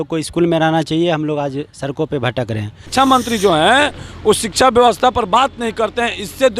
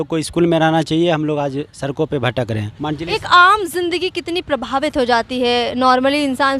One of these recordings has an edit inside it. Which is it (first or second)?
first